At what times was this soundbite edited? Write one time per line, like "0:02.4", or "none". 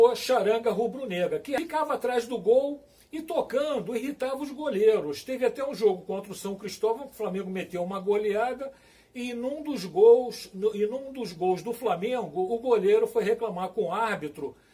0:01.6